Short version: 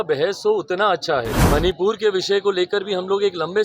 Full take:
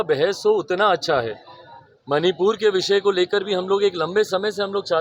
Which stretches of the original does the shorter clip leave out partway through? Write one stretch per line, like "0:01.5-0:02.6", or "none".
0:01.4-0:02.0

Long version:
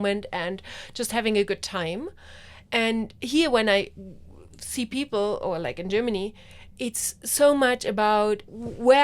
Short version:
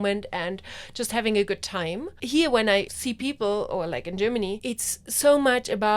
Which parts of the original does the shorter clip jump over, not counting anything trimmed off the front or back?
0:02.2-0:03.2
0:03.9-0:04.7
0:06.3-0:06.7

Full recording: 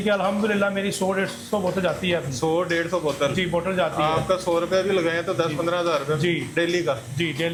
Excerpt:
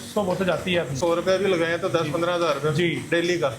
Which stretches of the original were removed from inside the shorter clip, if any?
0:02.3-0:04.4

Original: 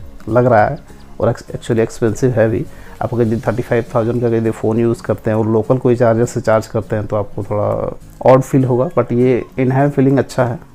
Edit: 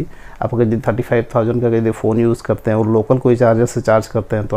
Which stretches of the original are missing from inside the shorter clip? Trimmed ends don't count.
none

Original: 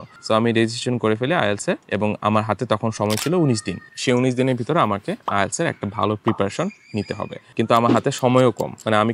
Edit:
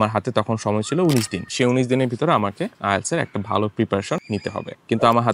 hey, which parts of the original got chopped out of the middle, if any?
0:03.8-0:03.9
0:06.9-0:07.1

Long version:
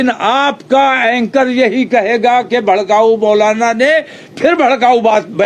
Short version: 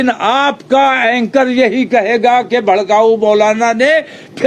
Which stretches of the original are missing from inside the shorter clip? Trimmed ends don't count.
none

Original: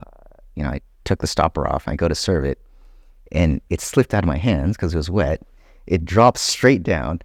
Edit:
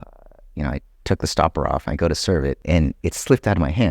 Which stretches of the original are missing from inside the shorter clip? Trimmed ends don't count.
0:02.6-0:03.3

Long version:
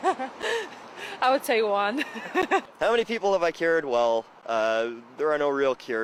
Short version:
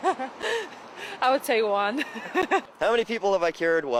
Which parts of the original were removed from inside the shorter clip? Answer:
none

